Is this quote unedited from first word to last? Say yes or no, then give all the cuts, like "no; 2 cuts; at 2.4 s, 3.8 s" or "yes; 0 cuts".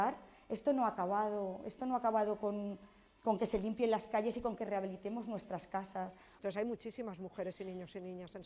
no; 1 cut; at 6.2 s